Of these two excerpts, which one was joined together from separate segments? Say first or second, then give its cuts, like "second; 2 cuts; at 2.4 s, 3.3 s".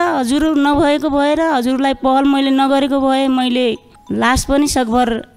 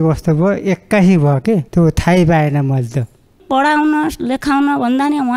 second; 2 cuts; at 1.7 s, 3.4 s